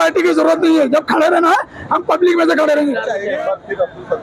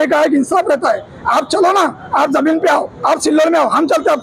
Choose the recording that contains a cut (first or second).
first